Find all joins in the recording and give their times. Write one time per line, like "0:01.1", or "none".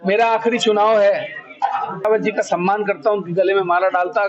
0:02.0